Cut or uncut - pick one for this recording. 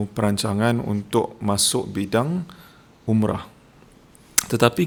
uncut